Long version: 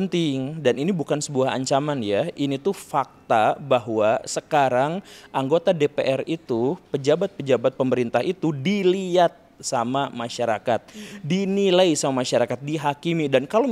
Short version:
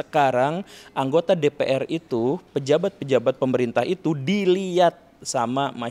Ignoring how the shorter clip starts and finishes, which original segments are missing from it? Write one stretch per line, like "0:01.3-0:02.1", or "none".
none